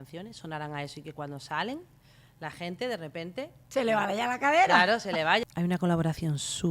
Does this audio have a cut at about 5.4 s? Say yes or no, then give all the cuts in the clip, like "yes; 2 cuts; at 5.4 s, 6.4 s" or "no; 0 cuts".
yes; 2 cuts; at 3.6 s, 5.4 s